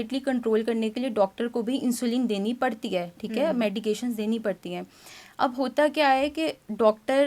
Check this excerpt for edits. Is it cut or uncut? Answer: uncut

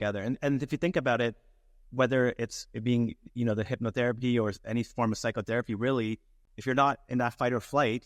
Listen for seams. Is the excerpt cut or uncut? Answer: cut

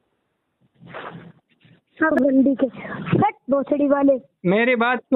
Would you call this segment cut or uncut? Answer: cut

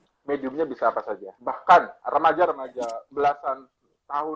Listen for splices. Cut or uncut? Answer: cut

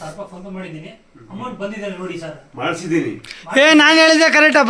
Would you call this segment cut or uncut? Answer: uncut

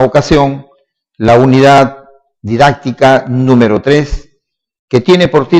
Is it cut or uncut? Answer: uncut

